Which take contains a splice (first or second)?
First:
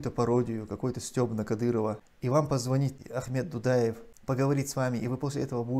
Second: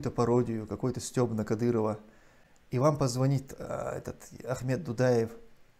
first